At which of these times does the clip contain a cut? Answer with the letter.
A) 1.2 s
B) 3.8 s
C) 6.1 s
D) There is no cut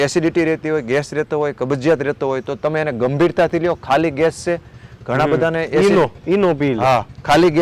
D